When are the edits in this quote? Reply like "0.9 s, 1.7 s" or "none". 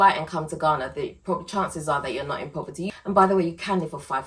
2.9 s